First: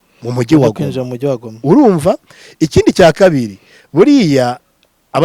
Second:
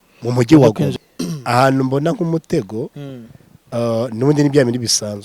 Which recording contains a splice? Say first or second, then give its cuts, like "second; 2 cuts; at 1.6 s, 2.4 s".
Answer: second; 1 cut; at 1.0 s